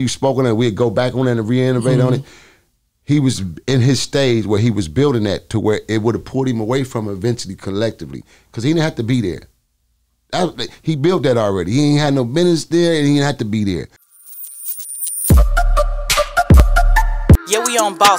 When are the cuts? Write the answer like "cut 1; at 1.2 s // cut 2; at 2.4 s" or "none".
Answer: cut 1; at 14.0 s